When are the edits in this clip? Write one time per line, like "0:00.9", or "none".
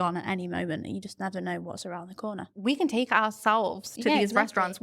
0:02.5